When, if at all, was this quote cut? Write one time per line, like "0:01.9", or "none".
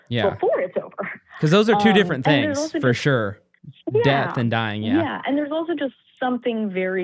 none